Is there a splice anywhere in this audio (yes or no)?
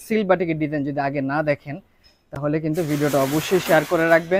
no